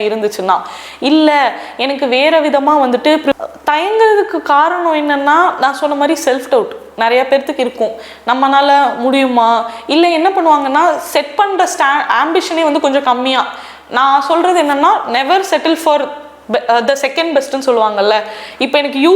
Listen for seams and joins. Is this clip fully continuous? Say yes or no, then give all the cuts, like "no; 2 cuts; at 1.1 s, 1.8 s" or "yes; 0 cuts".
no; 1 cut; at 3.4 s